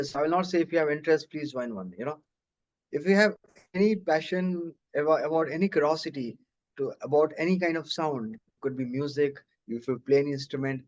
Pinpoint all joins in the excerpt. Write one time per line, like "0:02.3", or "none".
none